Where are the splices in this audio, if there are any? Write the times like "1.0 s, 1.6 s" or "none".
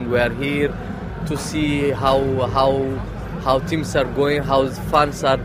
none